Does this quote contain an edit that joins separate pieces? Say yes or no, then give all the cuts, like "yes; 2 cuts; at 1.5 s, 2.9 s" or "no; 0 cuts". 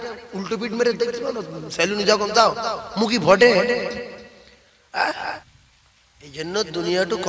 yes; 1 cut; at 5.5 s